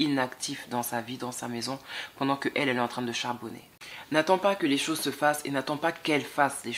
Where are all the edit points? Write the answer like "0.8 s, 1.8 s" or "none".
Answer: 3.7 s